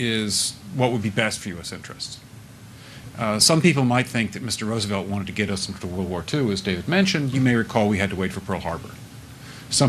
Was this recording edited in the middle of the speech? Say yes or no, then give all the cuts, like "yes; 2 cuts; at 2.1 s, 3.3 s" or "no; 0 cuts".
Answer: yes; 2 cuts; at 2.5 s, 6.5 s